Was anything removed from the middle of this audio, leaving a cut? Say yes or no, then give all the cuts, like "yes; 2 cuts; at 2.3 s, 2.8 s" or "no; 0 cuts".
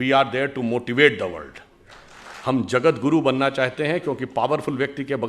yes; 1 cut; at 2.3 s